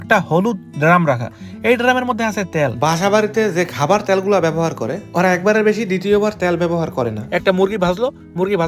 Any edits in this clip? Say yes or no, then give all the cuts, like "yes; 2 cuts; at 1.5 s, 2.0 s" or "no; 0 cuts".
no; 0 cuts